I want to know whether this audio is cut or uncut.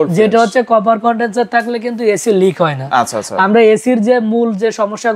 uncut